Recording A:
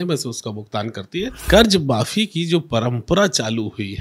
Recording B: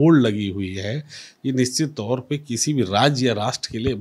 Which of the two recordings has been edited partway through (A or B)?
A